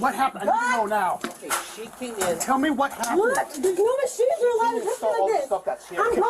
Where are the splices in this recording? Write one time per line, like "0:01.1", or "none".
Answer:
0:03.5